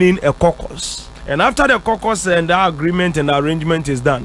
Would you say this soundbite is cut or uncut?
uncut